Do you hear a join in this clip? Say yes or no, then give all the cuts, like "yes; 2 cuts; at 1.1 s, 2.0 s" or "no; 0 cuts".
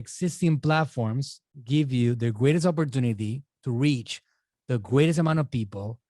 no; 0 cuts